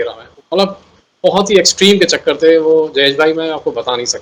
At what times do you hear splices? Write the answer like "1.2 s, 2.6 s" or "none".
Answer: none